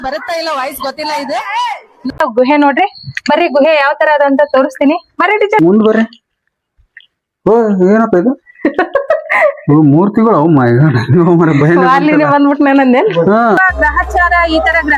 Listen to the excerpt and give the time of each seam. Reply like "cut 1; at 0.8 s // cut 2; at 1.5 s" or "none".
cut 1; at 2.2 s